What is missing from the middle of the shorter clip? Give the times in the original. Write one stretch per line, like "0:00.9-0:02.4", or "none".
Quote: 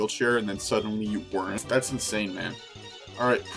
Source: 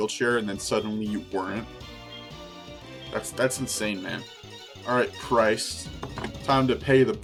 0:01.6-0:03.3